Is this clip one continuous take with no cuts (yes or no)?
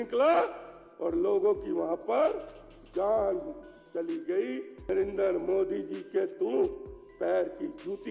no